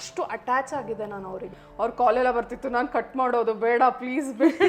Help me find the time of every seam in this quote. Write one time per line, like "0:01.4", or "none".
0:01.6